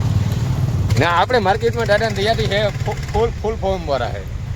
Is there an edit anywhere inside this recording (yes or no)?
yes